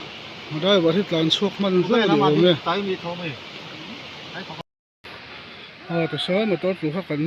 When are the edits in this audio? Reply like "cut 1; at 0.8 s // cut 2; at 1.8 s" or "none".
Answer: cut 1; at 4.6 s